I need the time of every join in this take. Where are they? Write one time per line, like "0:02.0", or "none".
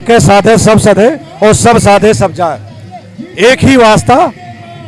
none